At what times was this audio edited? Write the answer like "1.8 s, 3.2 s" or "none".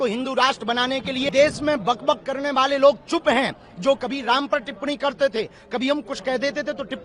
1.3 s